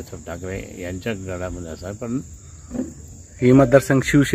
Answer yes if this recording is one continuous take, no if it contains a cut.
no